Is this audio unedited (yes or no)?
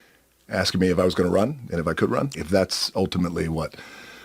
no